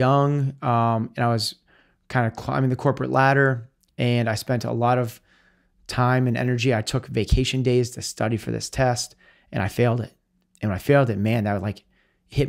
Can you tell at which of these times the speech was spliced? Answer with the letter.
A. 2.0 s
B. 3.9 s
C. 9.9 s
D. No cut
D